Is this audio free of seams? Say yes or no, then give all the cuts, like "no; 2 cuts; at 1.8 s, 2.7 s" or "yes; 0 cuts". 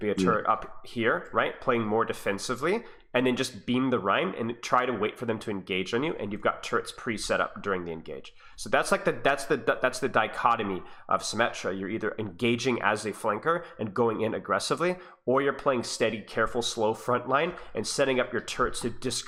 yes; 0 cuts